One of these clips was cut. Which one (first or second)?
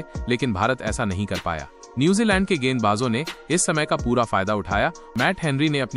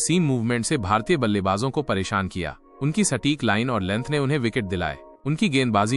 first